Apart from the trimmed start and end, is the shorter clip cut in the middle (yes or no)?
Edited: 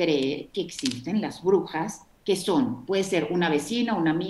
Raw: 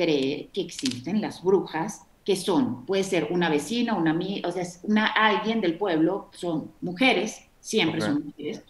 no